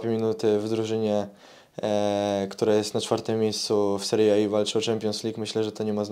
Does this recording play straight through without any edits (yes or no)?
yes